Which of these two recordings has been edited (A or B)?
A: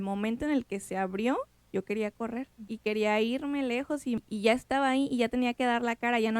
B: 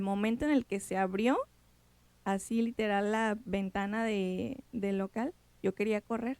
A